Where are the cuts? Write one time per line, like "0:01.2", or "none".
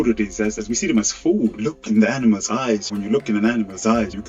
0:01.5